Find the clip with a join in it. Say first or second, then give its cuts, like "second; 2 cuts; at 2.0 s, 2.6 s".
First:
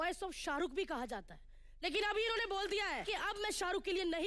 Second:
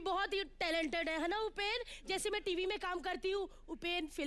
first; 2 cuts; at 1.5 s, 3.0 s